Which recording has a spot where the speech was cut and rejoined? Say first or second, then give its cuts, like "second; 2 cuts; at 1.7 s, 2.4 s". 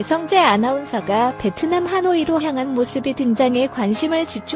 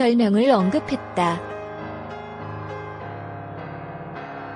second; 1 cut; at 1.6 s